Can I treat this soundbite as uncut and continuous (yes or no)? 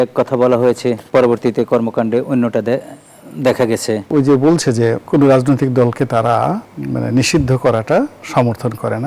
no